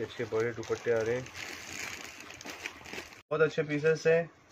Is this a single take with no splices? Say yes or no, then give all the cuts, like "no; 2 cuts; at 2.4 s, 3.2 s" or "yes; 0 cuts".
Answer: no; 1 cut; at 3.3 s